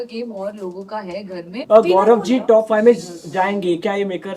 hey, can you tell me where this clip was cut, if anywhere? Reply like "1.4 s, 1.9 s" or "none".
1.6 s